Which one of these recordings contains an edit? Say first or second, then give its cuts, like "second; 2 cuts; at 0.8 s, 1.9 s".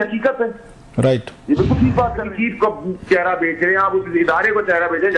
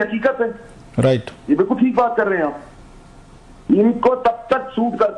first; 1 cut; at 2.3 s